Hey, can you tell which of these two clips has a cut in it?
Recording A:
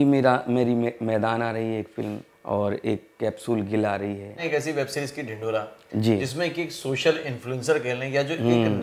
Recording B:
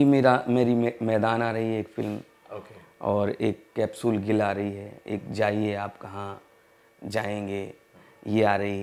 A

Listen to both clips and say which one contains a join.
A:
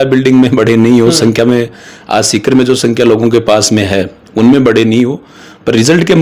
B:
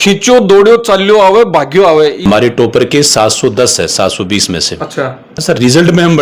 B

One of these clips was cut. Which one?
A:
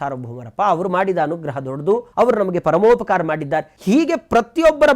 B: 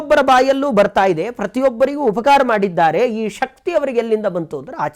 A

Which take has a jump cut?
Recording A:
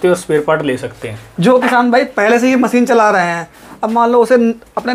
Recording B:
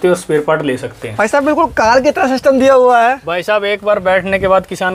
B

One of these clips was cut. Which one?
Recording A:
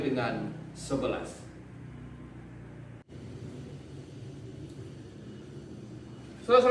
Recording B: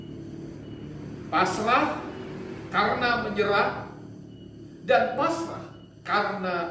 A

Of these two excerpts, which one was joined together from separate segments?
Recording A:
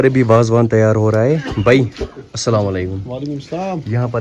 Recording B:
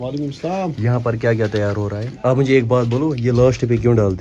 B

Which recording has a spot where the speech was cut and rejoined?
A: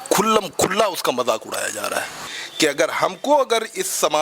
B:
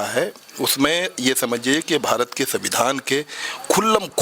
A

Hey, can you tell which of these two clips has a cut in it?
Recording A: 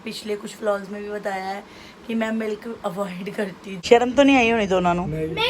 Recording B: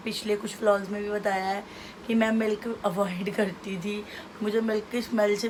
A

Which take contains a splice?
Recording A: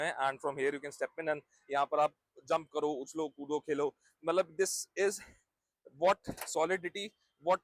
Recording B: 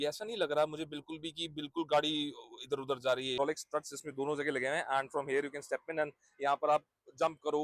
B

